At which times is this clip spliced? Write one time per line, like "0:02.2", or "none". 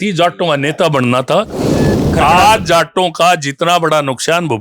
0:02.0